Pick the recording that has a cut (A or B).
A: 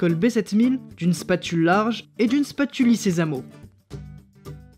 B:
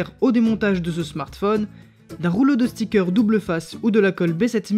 A